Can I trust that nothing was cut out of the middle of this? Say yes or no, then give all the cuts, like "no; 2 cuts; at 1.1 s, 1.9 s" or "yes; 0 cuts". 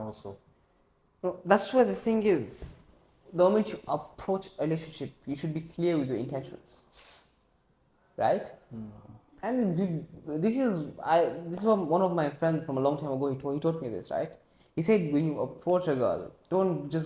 yes; 0 cuts